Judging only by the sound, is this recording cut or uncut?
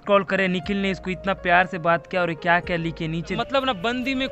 cut